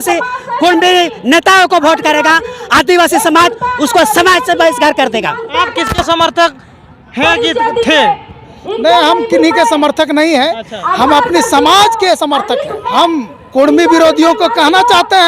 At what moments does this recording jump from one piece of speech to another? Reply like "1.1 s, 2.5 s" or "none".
5.5 s, 12.9 s